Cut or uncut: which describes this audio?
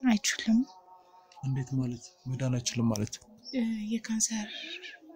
uncut